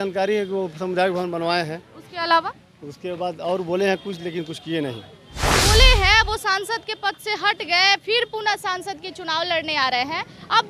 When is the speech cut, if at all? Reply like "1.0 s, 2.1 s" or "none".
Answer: 5.5 s

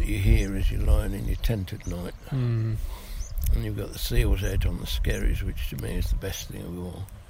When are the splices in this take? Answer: none

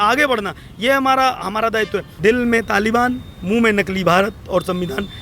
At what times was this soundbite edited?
2.1 s

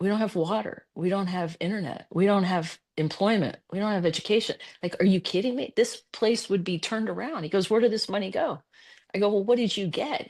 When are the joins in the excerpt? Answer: none

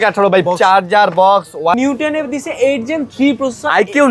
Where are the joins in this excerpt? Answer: 1.8 s

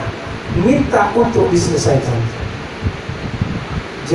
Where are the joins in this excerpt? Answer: none

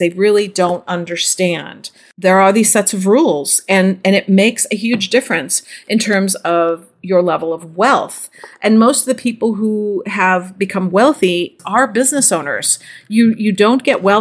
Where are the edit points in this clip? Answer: 11.5 s

